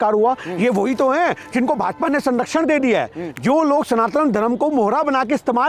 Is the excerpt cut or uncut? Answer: uncut